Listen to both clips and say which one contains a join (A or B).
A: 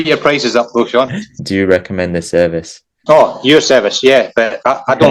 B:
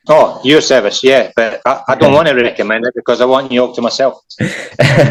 A